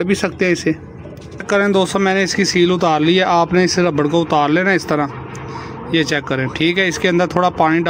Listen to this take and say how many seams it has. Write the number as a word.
one